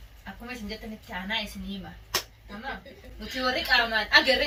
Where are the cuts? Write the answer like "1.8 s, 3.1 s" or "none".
none